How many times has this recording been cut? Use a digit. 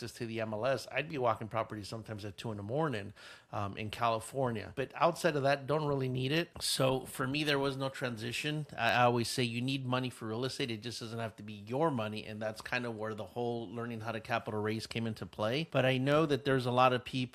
0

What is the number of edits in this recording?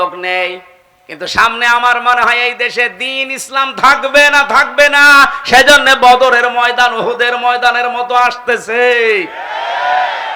0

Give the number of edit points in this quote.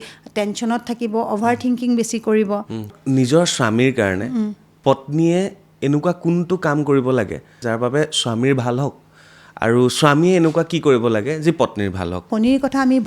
4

